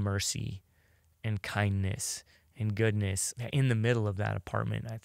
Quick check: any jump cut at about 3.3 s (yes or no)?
yes